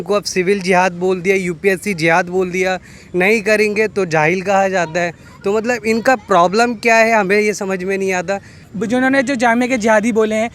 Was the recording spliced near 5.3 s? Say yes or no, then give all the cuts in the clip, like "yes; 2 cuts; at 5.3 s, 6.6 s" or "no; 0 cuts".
no; 1 cut; at 8.6 s